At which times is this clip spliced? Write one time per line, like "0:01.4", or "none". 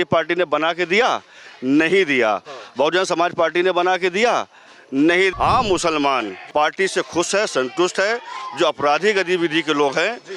0:05.3
0:06.4